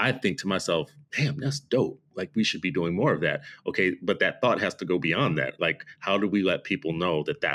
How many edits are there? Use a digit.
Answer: 0